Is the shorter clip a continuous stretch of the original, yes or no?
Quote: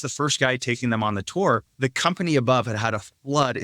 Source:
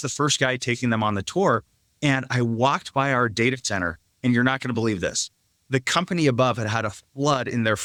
no